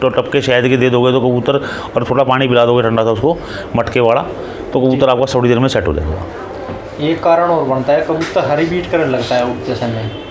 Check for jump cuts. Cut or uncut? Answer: uncut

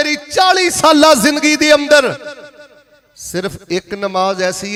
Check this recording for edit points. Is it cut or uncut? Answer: uncut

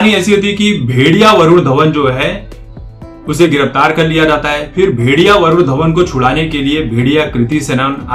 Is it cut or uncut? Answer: uncut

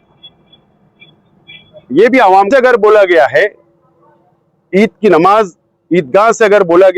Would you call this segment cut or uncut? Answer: cut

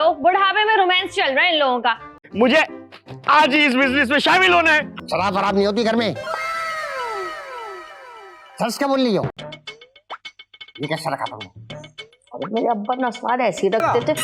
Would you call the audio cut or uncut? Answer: cut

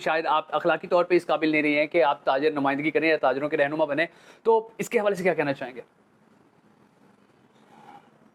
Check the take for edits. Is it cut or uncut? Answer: uncut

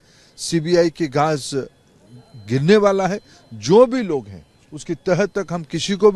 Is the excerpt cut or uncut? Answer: uncut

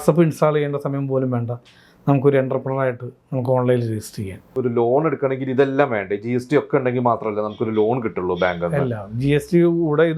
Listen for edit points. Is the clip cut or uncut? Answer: cut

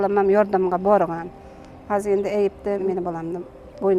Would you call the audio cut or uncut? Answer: cut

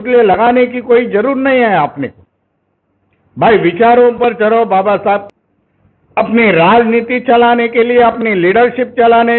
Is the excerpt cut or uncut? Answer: cut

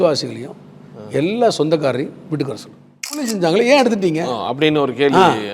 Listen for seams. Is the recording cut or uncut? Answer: cut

